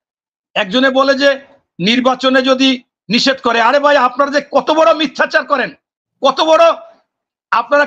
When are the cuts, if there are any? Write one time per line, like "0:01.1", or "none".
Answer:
none